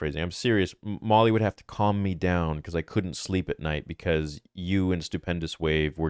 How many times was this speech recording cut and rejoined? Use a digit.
0